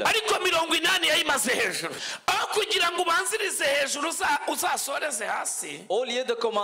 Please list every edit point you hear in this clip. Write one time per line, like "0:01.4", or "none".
0:02.0